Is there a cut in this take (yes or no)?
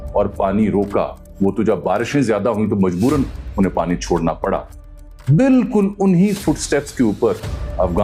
no